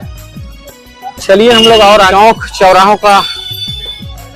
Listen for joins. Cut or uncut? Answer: cut